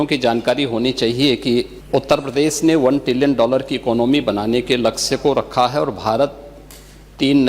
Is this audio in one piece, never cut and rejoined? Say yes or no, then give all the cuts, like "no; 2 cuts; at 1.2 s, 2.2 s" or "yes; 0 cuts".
no; 1 cut; at 1.8 s